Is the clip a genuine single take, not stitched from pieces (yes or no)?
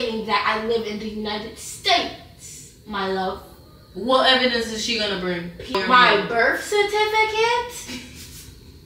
no